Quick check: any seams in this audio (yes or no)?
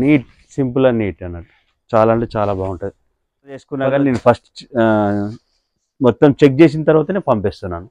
yes